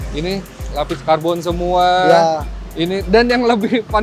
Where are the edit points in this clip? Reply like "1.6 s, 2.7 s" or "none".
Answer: none